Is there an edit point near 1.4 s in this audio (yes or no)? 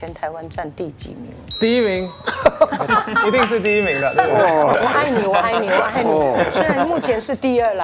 yes